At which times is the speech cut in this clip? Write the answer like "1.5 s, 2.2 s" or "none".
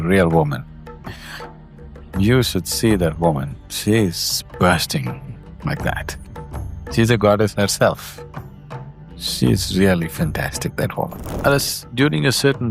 11.3 s